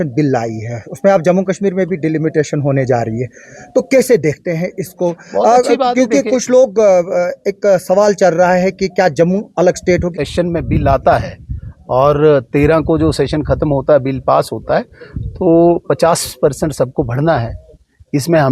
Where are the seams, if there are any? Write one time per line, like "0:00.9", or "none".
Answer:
0:10.1